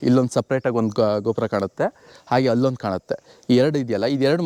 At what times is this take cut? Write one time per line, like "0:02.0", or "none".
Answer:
none